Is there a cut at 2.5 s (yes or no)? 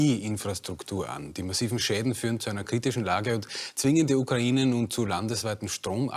no